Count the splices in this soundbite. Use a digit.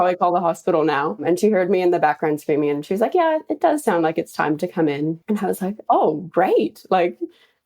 2